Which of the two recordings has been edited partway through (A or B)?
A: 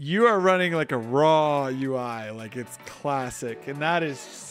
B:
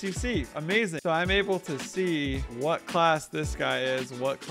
B